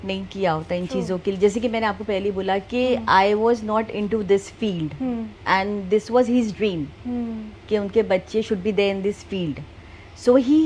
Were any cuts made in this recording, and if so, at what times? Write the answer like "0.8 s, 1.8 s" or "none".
none